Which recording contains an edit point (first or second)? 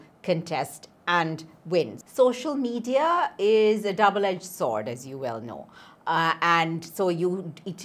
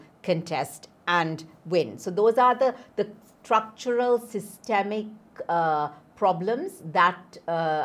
first